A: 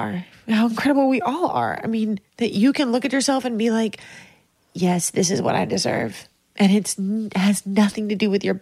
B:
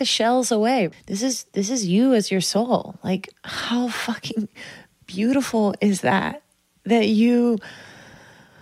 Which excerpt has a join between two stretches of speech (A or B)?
B